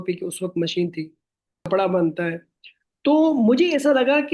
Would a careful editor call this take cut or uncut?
cut